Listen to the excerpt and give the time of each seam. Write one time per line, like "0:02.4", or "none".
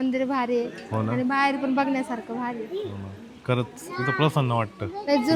none